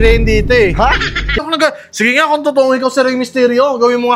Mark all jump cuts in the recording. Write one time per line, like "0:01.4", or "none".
0:01.5